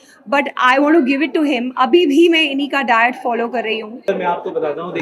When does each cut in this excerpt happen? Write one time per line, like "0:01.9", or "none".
0:04.0